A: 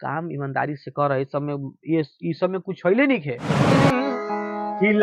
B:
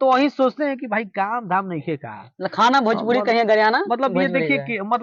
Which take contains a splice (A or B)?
A